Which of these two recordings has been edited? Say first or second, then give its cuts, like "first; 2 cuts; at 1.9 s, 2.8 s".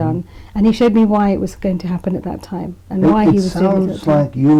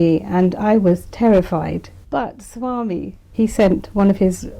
second; 2 cuts; at 1.9 s, 3.2 s